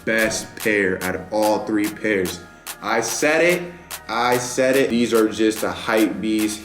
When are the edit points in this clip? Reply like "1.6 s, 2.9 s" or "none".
4.9 s